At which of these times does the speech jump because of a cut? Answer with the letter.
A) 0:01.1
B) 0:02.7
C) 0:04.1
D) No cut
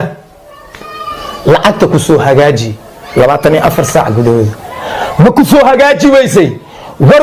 D